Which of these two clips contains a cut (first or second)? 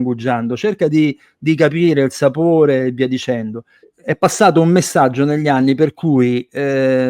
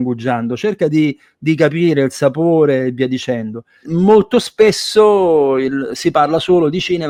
first